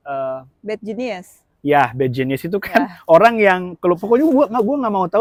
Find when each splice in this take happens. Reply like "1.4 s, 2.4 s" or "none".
none